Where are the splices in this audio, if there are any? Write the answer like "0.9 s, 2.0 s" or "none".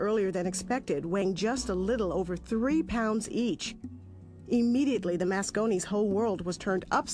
none